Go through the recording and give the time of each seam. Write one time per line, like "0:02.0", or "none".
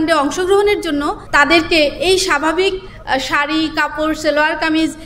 0:01.2